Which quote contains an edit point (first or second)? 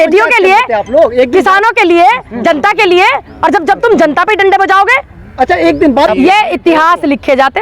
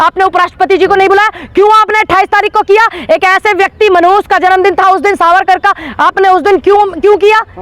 first